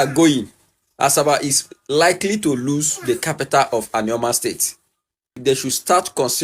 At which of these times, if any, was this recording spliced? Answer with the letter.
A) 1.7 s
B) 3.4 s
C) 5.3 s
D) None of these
C